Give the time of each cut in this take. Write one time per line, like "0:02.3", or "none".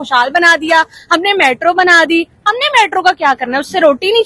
none